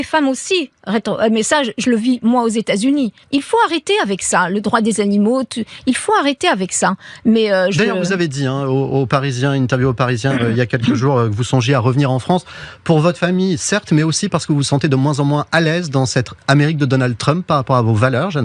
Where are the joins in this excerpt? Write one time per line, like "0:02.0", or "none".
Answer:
0:03.2